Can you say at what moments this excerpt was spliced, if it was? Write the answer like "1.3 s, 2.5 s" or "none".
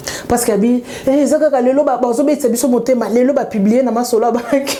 none